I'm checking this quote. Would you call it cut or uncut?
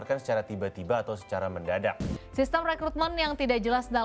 cut